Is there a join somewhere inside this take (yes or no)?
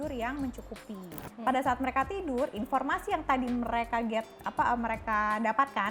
yes